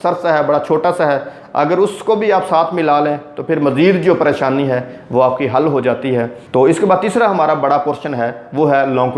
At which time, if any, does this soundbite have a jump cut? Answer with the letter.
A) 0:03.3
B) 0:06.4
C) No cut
B